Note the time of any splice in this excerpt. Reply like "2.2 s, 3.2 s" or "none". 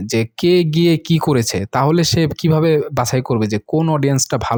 none